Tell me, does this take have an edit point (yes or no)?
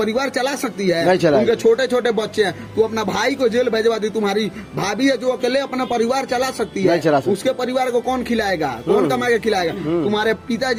no